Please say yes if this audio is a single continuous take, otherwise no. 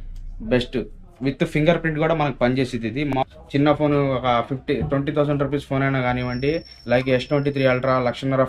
no